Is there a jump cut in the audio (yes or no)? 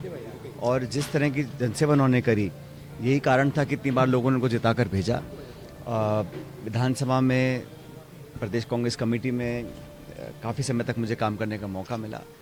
no